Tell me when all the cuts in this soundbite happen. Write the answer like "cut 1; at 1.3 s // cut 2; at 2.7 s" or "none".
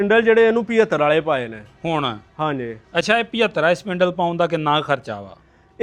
none